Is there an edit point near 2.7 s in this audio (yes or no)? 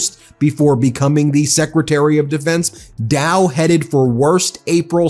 yes